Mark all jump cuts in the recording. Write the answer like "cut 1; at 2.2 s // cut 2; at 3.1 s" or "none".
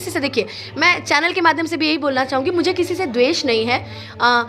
none